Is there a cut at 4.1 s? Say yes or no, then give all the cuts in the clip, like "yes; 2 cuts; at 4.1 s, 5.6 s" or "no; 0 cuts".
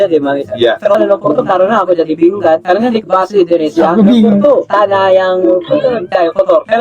no; 1 cut; at 1.0 s